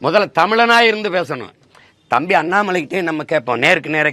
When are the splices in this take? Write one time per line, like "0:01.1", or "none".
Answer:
none